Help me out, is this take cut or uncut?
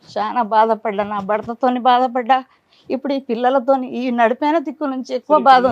uncut